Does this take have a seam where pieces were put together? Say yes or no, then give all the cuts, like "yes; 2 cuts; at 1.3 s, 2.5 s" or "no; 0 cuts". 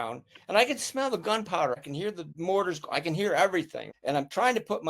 yes; 2 cuts; at 1.9 s, 3.8 s